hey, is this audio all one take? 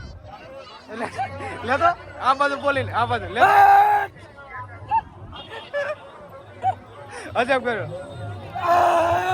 yes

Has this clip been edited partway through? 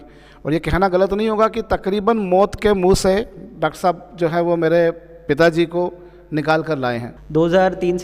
yes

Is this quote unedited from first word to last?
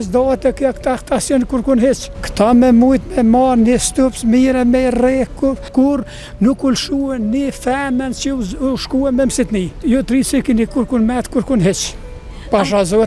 no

